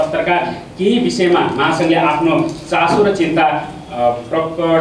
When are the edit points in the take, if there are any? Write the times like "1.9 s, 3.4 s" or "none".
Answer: none